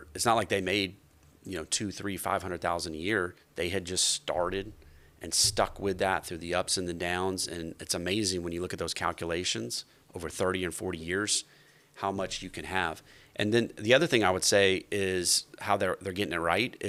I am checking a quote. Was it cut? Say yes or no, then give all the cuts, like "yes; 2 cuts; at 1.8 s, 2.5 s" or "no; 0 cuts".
no; 0 cuts